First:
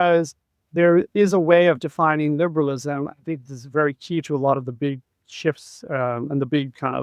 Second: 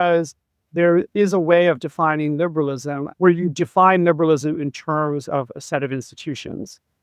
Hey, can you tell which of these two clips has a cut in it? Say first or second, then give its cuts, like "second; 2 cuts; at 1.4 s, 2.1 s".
second; 1 cut; at 3.1 s